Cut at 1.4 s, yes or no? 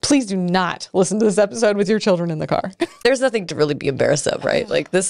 no